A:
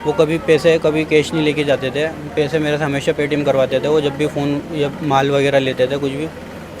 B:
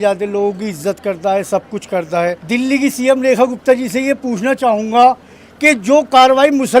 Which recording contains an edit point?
B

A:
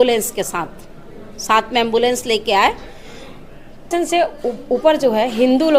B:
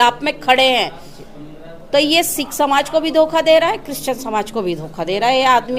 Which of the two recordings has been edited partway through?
A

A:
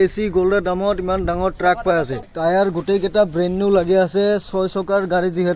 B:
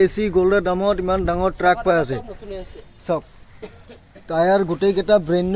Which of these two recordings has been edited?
A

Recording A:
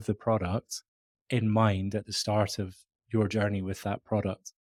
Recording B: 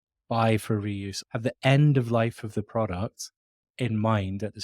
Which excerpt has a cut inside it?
B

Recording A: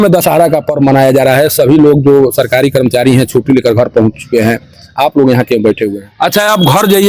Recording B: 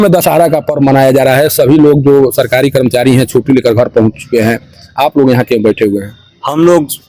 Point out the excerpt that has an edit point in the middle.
A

